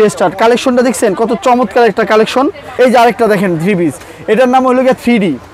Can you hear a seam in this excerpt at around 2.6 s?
yes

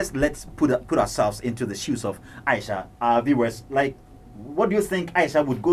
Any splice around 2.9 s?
no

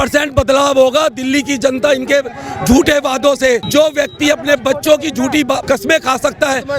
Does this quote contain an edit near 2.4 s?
no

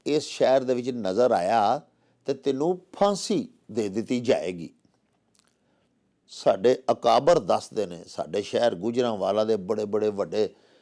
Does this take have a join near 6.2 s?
yes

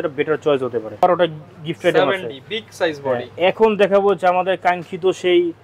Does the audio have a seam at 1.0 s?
yes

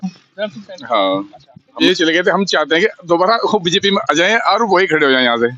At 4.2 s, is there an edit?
no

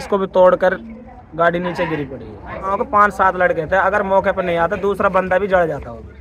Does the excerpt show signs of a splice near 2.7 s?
yes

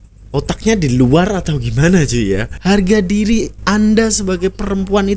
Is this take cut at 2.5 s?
yes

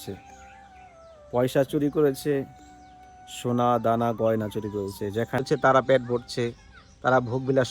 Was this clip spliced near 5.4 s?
yes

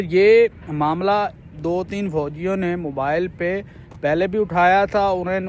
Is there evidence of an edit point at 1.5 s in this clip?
no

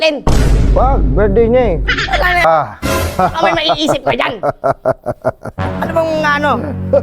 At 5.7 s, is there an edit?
no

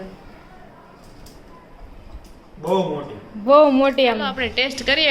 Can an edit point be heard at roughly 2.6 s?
no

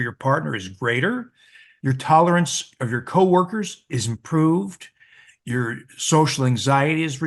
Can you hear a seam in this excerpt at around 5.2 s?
no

